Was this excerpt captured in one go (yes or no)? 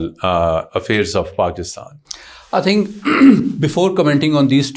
yes